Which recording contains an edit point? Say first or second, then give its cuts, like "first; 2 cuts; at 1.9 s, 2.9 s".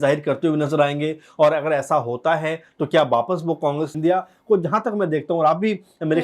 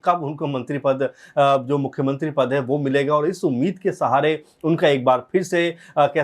first; 1 cut; at 3.9 s